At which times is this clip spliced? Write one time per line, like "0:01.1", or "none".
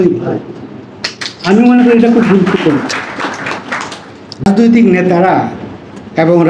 0:04.4